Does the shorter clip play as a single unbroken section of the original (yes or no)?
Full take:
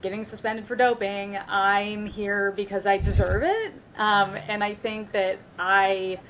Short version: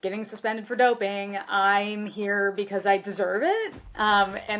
yes